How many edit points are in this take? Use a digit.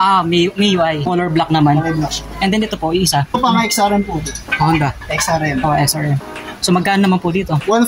2